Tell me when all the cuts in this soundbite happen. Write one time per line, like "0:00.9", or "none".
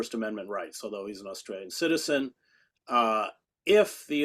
none